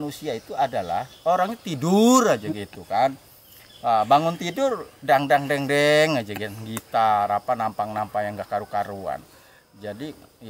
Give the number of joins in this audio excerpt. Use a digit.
0